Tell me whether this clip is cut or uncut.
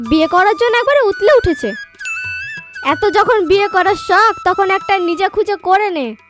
uncut